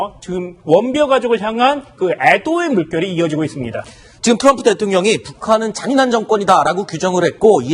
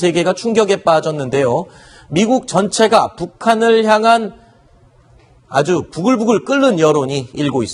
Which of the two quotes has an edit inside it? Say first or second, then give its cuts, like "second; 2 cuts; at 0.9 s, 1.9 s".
first; 1 cut; at 2.9 s